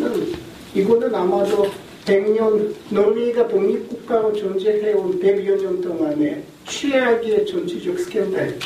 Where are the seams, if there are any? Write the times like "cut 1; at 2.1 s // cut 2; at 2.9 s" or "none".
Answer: cut 1; at 5.9 s